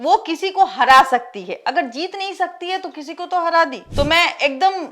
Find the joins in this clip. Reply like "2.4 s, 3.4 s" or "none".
3.8 s